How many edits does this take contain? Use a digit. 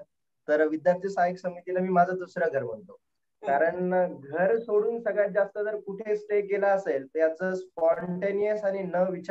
0